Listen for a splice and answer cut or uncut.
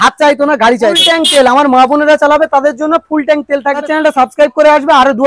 cut